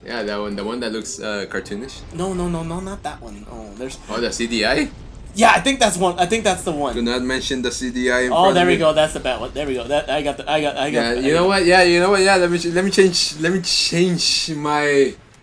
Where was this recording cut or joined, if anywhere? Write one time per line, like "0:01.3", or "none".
none